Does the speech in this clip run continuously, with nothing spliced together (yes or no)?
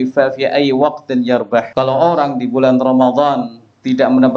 no